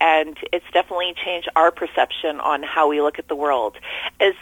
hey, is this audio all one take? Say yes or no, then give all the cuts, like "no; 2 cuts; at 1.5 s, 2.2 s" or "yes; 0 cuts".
yes; 0 cuts